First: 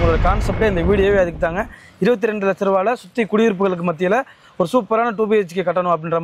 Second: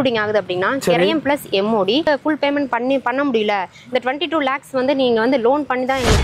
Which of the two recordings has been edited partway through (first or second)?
second